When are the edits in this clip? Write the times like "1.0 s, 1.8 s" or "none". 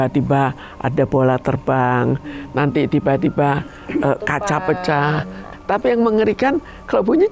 5.4 s